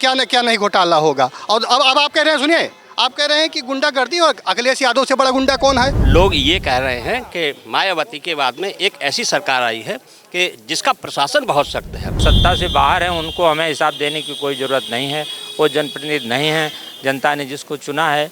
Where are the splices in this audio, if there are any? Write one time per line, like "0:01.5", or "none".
0:06.0
0:12.2

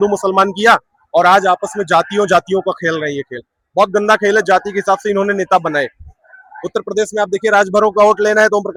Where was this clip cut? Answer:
none

